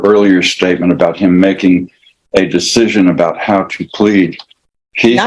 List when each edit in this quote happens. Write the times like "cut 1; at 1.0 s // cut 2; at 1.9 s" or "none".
none